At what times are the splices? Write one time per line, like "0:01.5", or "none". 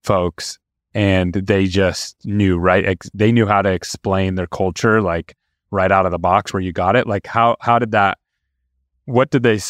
none